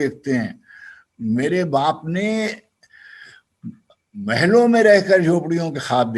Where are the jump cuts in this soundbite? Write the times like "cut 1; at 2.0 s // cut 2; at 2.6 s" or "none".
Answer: none